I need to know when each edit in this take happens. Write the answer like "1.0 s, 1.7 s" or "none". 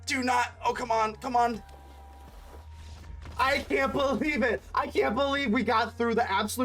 2.6 s